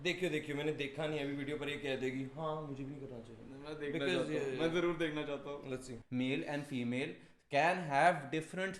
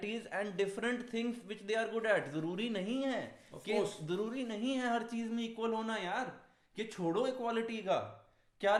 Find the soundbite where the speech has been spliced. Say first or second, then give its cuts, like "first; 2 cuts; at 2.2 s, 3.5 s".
first; 1 cut; at 6.0 s